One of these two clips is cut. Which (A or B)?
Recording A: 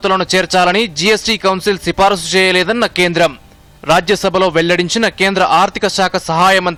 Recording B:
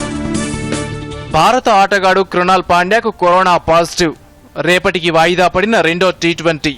B